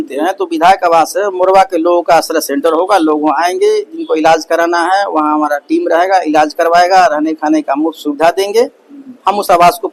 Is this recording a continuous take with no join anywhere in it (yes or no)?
yes